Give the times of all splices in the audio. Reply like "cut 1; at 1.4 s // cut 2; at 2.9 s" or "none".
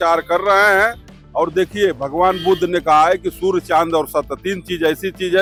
none